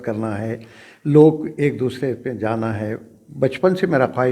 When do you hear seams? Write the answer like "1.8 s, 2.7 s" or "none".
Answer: none